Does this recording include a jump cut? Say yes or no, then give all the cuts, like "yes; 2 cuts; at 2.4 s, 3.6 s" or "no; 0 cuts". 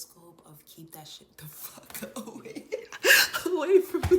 no; 0 cuts